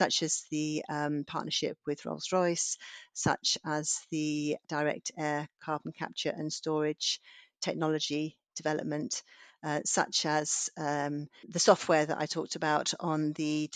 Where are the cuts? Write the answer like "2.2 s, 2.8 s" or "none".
4.6 s, 11.4 s